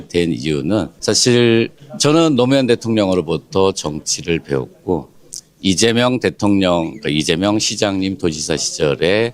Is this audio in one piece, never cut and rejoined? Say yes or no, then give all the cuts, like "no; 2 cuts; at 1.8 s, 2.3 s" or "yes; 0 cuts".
no; 2 cuts; at 0.9 s, 1.8 s